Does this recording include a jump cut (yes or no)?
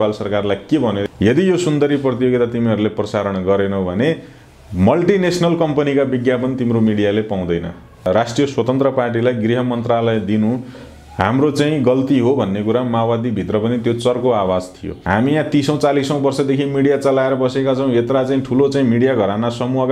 yes